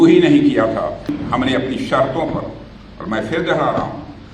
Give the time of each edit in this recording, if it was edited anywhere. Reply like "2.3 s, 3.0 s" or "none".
1.1 s

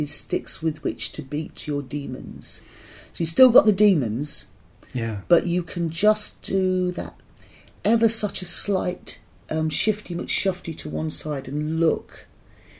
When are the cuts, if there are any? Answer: none

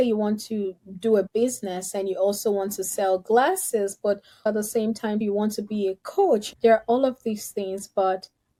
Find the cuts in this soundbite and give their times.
none

